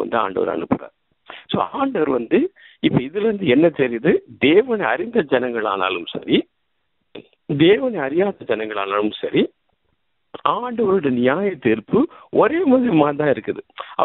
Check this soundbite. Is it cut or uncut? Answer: uncut